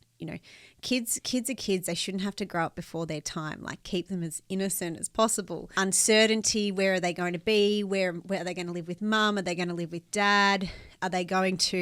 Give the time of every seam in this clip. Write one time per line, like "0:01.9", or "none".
0:05.7